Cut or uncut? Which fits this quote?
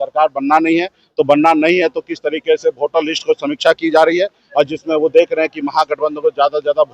uncut